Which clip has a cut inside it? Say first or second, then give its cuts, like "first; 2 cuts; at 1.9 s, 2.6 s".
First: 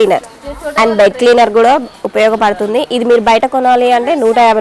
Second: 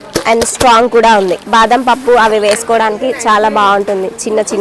second; 1 cut; at 1.4 s